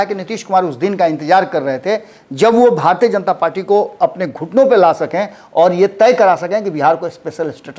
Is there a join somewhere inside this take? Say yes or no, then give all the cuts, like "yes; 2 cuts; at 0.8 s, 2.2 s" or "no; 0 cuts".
no; 0 cuts